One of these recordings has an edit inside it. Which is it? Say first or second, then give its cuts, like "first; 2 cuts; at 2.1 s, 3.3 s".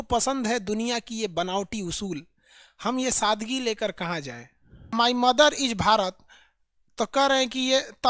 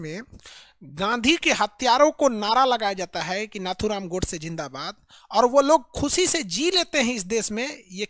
first; 1 cut; at 4.9 s